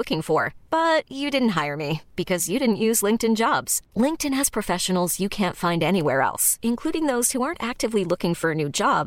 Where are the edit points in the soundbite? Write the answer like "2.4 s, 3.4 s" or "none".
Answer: none